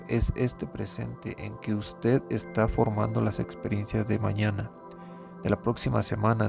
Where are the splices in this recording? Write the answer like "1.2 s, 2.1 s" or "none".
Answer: none